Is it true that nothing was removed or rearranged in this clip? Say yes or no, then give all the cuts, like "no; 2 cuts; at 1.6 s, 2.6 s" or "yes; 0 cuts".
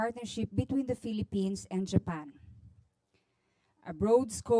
yes; 0 cuts